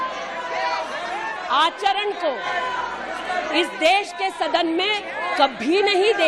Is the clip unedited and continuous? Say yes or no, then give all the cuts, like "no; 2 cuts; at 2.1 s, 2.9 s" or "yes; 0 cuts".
yes; 0 cuts